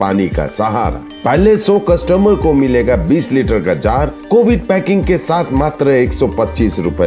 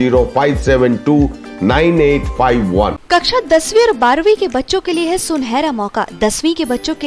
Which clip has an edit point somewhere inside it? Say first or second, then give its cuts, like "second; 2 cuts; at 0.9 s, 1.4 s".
second; 1 cut; at 3.0 s